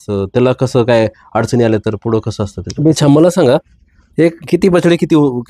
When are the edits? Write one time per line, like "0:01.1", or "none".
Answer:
0:03.0